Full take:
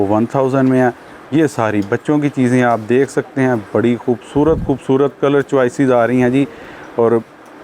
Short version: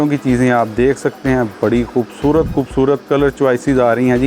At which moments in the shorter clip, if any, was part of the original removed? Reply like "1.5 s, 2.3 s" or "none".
none